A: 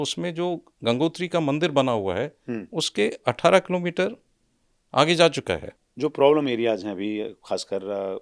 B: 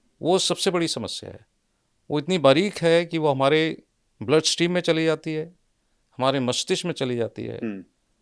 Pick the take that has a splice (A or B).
A